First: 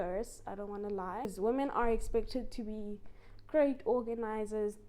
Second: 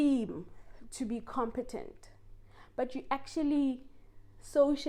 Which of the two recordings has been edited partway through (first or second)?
first